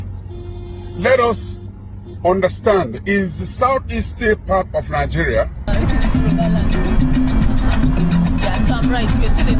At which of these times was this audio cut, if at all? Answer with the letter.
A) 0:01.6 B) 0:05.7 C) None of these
B